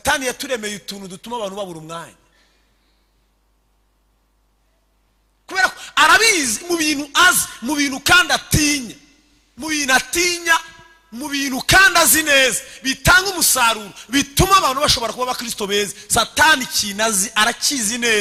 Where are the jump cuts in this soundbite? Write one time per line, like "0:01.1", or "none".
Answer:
none